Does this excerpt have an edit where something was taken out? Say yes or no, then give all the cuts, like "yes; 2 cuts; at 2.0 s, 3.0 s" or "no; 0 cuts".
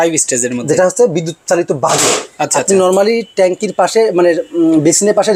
no; 0 cuts